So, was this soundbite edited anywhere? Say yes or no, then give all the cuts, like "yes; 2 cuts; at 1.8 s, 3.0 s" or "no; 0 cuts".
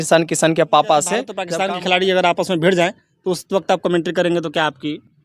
yes; 1 cut; at 1.4 s